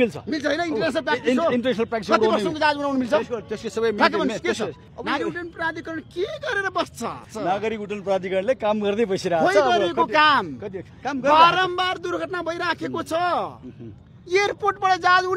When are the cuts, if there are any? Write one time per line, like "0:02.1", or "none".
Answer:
0:04.9
0:07.3

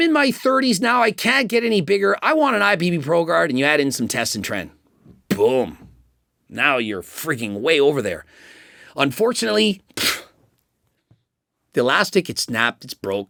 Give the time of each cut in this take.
none

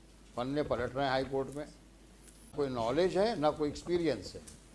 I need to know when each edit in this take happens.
0:02.5

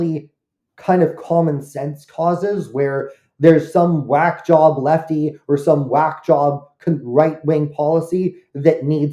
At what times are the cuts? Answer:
none

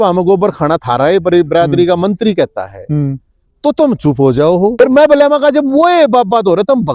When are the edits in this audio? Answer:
0:04.7

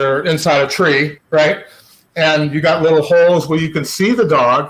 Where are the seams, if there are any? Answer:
none

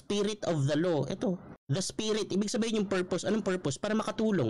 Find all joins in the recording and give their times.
0:01.5

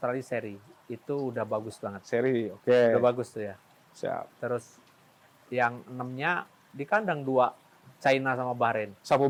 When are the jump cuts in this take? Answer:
none

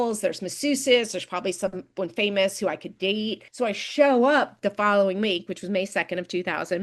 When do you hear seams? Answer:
0:03.4

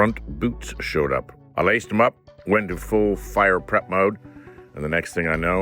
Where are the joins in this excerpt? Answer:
0:01.4

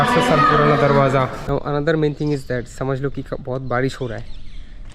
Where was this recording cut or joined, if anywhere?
0:01.4

